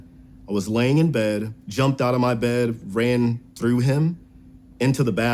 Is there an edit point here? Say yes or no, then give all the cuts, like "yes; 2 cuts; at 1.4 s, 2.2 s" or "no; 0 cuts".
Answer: yes; 1 cut; at 1.6 s